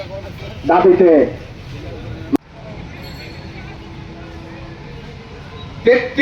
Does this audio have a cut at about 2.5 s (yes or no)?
no